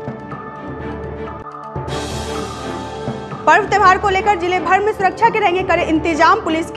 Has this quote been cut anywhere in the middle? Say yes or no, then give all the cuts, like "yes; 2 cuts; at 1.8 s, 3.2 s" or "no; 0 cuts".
no; 0 cuts